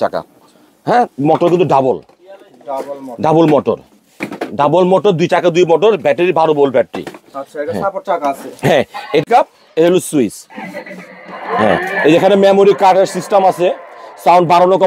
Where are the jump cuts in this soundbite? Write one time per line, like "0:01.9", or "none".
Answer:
0:09.2